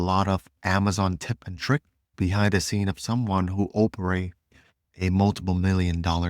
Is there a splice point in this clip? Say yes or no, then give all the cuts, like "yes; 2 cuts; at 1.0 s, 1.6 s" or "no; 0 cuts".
yes; 1 cut; at 2.1 s